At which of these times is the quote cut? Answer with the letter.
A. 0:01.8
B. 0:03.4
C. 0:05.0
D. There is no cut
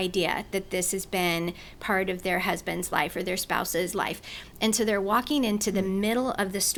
D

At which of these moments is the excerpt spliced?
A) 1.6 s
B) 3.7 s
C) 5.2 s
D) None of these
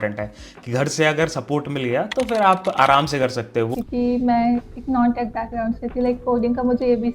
B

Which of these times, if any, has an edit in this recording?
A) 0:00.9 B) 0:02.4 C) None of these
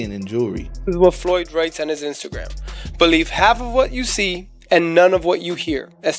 A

